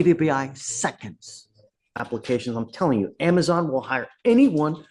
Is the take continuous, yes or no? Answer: no